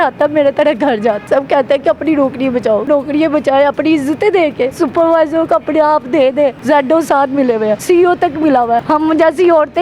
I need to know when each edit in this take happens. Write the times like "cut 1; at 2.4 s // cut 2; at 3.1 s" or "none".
cut 1; at 1.2 s // cut 2; at 2.8 s // cut 3; at 4.7 s // cut 4; at 6.6 s // cut 5; at 7.8 s // cut 6; at 8.8 s